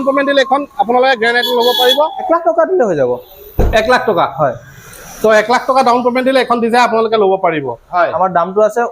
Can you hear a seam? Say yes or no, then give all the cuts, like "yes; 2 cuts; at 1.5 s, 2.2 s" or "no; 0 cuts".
yes; 2 cuts; at 2.2 s, 7.8 s